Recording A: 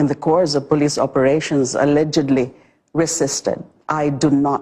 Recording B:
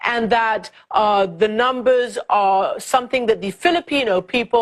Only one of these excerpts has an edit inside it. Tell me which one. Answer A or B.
B